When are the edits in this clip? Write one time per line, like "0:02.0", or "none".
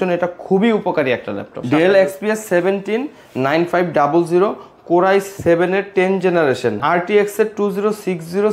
0:01.6
0:06.8